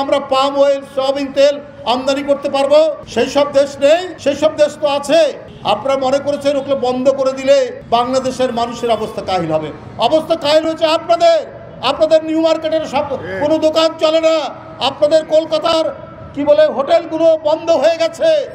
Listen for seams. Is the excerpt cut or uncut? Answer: cut